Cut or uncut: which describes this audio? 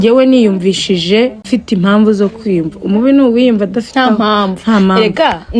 cut